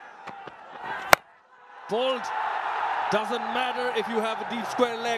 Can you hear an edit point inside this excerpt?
no; 0 cuts

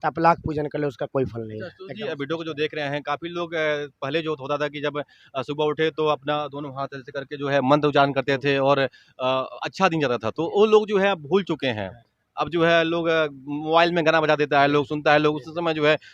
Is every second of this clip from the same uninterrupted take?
yes; 0 cuts

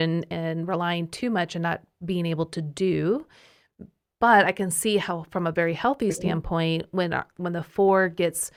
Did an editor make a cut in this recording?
no; 0 cuts

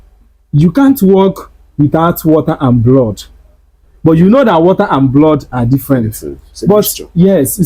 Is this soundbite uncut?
no; 1 cut; at 6.4 s

